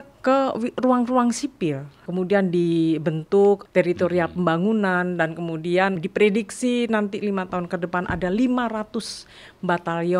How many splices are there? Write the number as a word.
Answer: three